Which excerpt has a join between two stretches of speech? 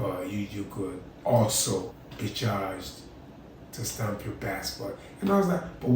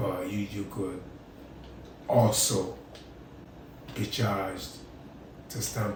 first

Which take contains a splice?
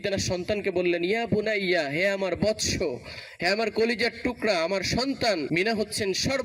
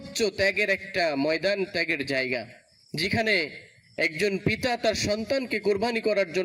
first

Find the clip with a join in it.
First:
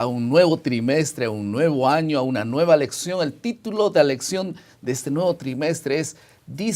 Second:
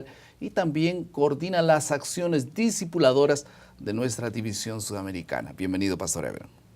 second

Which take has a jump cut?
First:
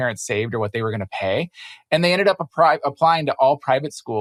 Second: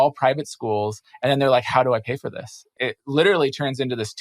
second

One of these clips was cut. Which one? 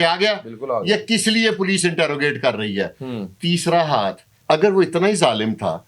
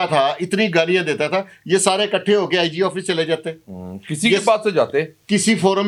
first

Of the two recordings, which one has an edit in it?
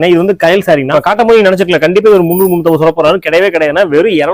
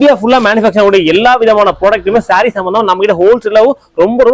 first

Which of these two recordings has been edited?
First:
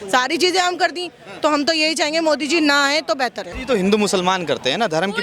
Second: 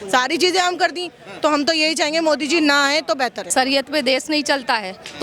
second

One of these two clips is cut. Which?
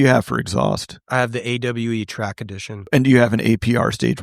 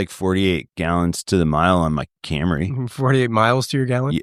first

